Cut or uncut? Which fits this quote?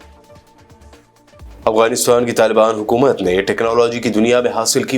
cut